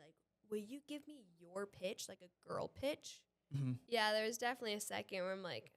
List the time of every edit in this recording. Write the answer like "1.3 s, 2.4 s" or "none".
3.8 s